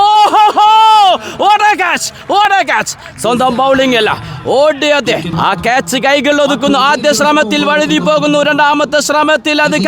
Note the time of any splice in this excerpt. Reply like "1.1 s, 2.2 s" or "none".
5.3 s